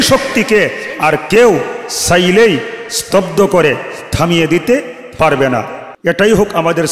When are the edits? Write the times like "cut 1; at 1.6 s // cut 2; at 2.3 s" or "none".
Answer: cut 1; at 5.9 s